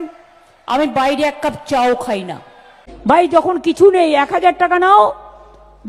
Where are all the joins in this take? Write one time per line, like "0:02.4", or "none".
0:02.8